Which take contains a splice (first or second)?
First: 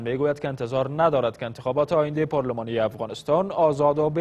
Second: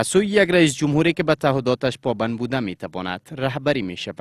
second